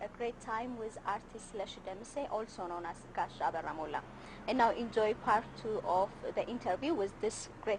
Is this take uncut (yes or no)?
no